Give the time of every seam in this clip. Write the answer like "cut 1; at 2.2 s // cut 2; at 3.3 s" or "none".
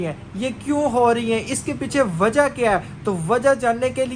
none